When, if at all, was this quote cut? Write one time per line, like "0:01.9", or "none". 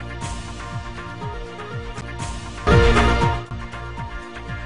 none